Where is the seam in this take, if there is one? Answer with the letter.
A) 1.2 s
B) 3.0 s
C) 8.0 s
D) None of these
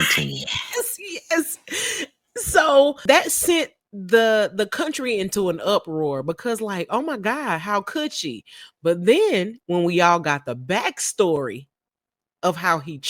B